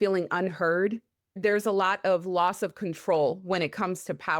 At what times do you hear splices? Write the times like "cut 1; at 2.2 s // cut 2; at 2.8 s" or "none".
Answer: cut 1; at 1.4 s

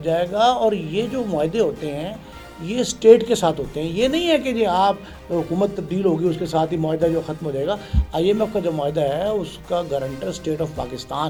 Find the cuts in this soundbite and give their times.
none

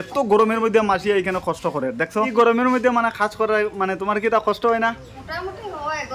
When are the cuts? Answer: cut 1; at 2.3 s // cut 2; at 5.2 s

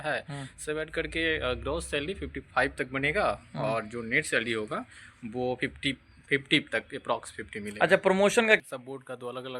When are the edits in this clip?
cut 1; at 8.6 s

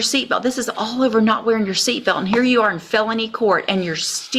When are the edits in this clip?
none

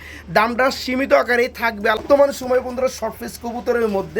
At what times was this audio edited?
cut 1; at 2.0 s

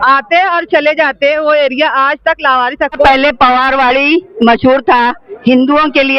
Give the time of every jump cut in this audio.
cut 1; at 3.0 s

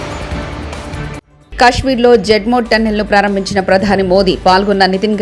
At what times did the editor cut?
cut 1; at 1.4 s

